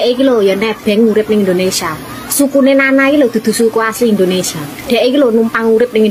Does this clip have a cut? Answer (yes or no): no